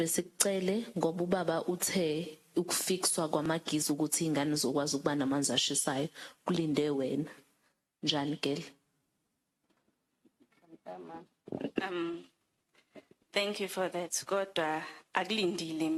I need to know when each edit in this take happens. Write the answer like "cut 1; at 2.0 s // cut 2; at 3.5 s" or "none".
none